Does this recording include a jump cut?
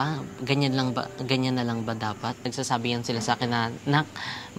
yes; 1 cut; at 2.4 s

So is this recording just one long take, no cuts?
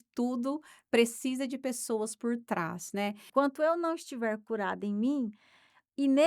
no; 1 cut; at 3.2 s

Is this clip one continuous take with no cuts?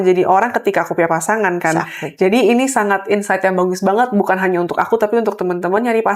yes; 0 cuts

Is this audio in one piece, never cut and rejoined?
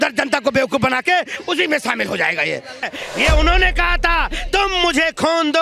no; 1 cut; at 2.8 s

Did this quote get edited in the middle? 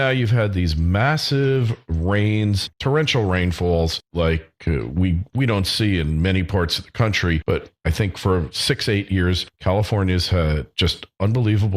yes; 1 cut; at 4.0 s

